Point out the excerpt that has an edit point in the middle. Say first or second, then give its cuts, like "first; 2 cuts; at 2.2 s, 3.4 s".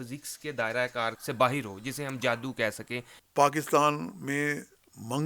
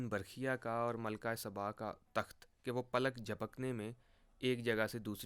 first; 2 cuts; at 1.2 s, 3.1 s